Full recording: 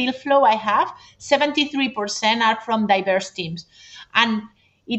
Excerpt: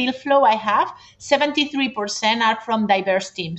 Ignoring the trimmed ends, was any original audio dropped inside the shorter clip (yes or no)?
no